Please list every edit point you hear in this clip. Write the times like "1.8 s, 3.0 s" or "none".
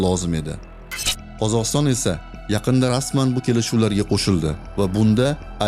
0.9 s

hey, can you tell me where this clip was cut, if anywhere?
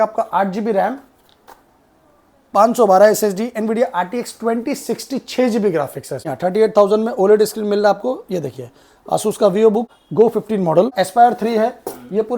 6.3 s, 10.0 s, 10.9 s

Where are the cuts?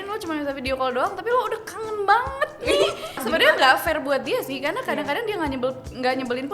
3.2 s

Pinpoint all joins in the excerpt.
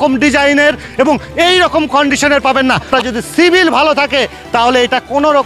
2.9 s

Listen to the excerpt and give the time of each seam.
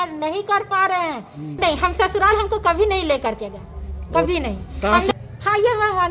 1.4 s, 5.1 s

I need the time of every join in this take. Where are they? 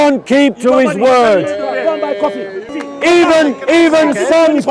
2.8 s

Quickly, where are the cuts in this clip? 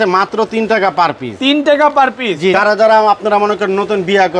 2.5 s

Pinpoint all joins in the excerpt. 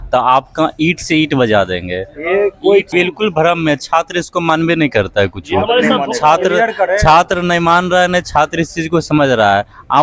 2.9 s

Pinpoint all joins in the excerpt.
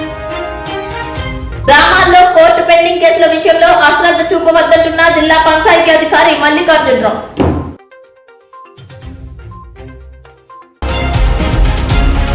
10.7 s

